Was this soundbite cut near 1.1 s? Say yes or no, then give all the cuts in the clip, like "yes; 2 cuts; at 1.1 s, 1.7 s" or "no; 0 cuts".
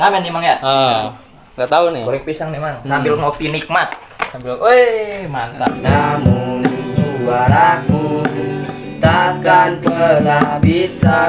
no; 1 cut; at 5.7 s